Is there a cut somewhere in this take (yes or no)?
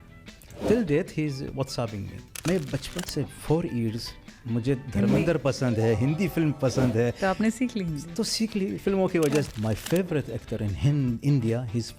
yes